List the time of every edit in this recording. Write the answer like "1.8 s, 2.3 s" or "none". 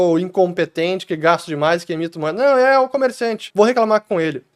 3.4 s